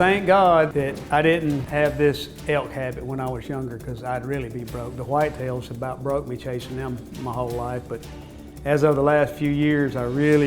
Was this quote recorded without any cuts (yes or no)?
no